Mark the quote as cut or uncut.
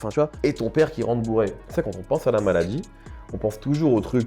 cut